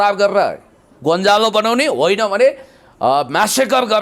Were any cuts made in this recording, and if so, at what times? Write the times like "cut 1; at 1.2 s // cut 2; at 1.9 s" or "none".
none